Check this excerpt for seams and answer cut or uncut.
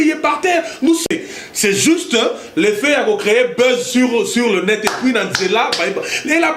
cut